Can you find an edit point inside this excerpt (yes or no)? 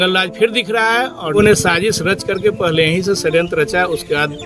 yes